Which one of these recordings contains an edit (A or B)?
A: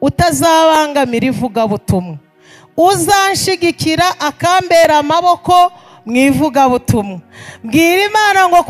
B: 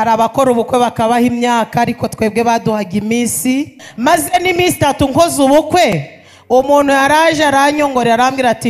B